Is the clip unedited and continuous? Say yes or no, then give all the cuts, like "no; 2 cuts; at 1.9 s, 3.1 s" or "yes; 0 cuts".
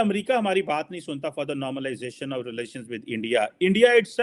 yes; 0 cuts